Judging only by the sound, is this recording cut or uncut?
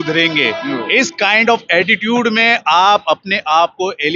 uncut